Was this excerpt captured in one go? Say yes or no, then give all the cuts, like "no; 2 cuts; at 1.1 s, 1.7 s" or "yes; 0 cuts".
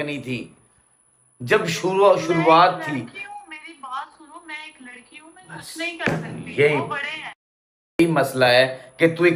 yes; 0 cuts